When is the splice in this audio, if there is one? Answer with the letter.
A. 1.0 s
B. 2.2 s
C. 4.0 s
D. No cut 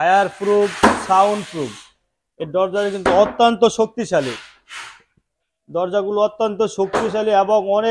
D